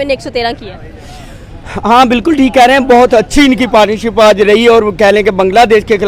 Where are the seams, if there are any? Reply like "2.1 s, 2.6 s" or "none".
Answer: none

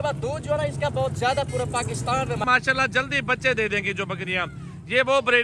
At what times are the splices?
2.4 s

